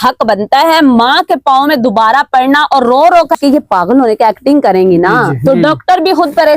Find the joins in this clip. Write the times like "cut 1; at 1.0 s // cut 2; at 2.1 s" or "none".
cut 1; at 3.4 s